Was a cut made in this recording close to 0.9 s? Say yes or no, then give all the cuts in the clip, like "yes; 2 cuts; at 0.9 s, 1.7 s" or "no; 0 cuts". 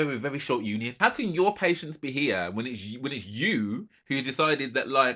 yes; 1 cut; at 0.9 s